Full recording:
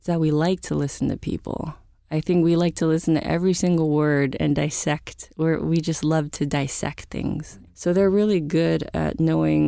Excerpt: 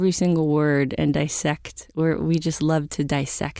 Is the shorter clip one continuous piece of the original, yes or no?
yes